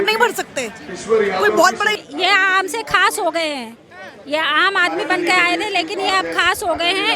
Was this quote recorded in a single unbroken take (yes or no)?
no